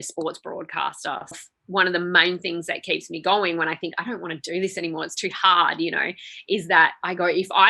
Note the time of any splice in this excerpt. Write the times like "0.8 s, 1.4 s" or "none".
1.3 s